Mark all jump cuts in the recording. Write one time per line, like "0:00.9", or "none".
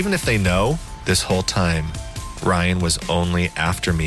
0:00.9